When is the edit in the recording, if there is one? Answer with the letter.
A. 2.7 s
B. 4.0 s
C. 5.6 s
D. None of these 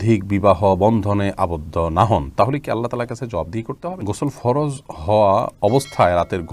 B